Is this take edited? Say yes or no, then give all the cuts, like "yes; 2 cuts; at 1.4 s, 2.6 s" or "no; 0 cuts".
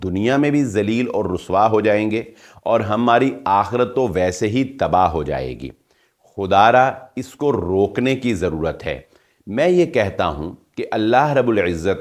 no; 0 cuts